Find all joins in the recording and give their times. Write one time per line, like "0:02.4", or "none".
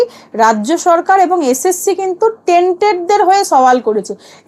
none